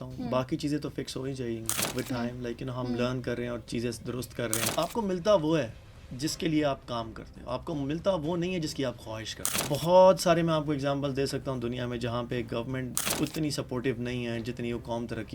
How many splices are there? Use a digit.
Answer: 2